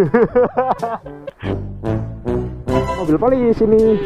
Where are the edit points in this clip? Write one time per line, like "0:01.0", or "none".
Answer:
0:03.0

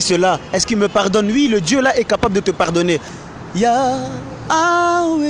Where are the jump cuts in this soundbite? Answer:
0:03.2

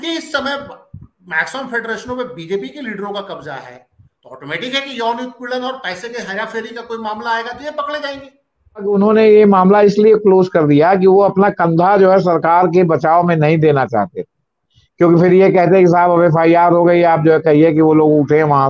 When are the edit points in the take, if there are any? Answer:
0:08.9

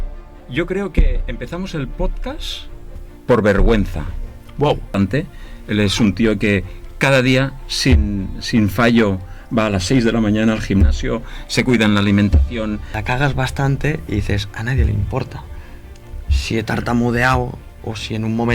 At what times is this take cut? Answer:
0:04.9
0:12.9

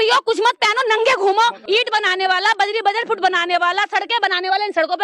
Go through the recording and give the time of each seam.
0:01.6

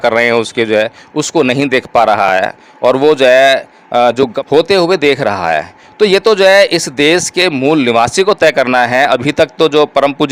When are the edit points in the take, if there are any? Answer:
none

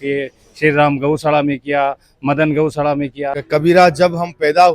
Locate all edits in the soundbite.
0:03.4

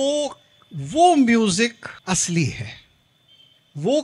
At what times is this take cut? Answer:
0:01.9

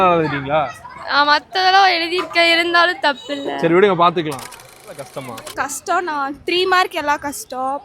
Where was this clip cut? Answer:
0:05.0

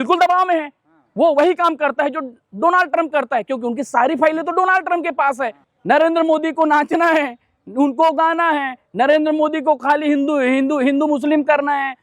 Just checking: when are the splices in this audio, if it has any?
0:05.7

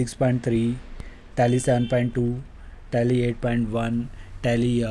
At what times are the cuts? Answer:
none

